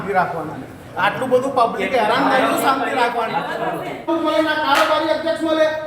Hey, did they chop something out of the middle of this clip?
yes; 1 cut; at 4.0 s

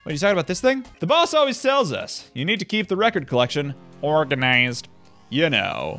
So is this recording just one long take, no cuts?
no; 1 cut; at 0.9 s

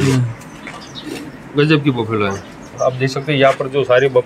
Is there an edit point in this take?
yes; 1 cut; at 2.7 s

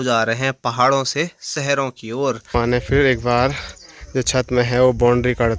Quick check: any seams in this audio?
yes; 1 cut; at 2.5 s

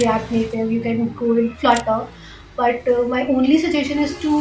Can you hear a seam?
no; 0 cuts

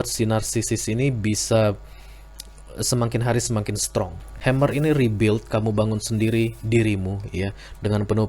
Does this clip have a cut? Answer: yes; 1 cut; at 4.2 s

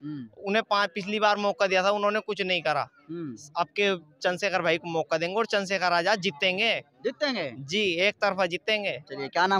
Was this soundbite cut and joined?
no; 0 cuts

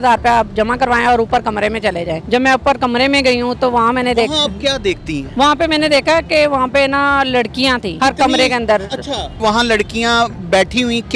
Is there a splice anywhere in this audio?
yes; 4 cuts; at 2.2 s, 5.2 s, 7.9 s, 9.4 s

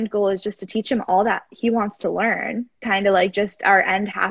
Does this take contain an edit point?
yes; 1 cut; at 2.7 s

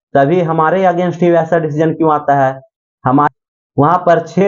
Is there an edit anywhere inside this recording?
yes; 1 cut; at 3.3 s

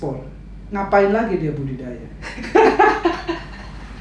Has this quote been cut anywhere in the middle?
no; 0 cuts

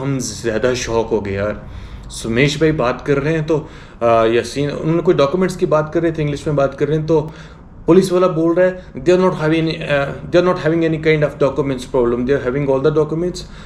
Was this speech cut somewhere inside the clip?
no; 0 cuts

